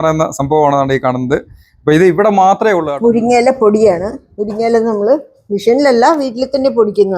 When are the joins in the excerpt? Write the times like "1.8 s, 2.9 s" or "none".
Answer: 2.9 s